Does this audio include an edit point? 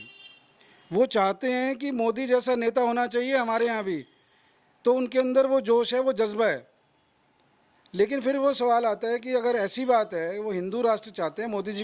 no; 0 cuts

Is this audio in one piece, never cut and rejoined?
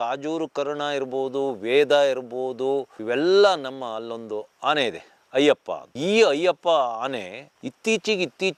yes; 0 cuts

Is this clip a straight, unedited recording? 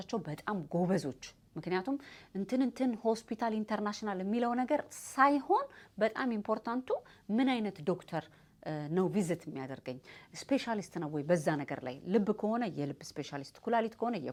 yes; 0 cuts

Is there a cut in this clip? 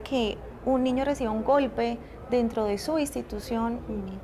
no; 0 cuts

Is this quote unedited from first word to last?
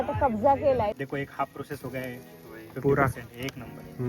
no; 1 cut; at 1.0 s

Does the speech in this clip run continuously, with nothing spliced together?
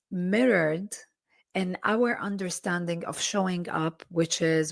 yes; 0 cuts

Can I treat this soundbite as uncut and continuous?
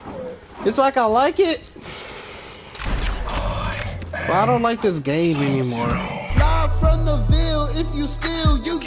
no; 1 cut; at 6.0 s

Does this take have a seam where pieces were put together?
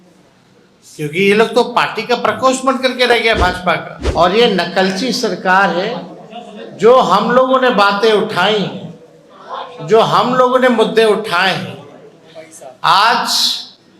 yes; 1 cut; at 4.0 s

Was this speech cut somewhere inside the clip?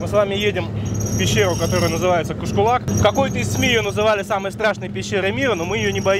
yes; 1 cut; at 2.9 s

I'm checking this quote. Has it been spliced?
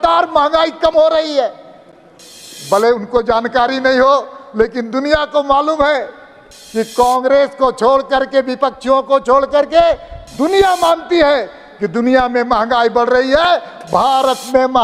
no; 0 cuts

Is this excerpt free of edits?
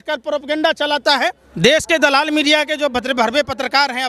no; 1 cut; at 1.4 s

